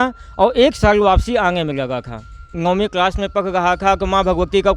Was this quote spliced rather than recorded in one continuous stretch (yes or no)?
yes